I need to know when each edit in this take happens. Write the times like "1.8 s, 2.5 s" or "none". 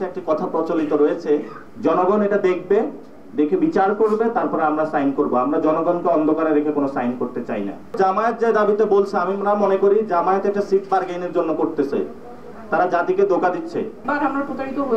1.6 s, 7.8 s, 14.0 s